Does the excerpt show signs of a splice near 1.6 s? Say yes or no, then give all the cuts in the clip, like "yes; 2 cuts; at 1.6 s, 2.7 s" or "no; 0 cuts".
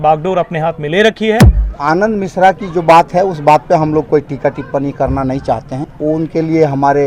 yes; 2 cuts; at 1.6 s, 5.8 s